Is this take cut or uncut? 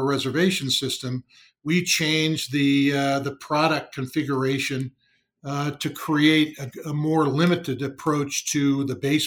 uncut